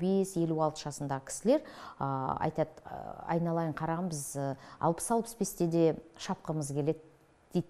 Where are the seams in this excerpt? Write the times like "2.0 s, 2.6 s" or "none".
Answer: none